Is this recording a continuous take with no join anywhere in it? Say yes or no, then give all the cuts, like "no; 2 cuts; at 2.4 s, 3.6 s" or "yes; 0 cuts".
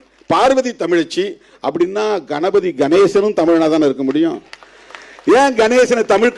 yes; 0 cuts